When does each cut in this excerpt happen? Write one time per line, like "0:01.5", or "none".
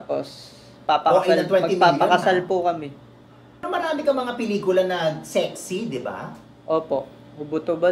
0:03.7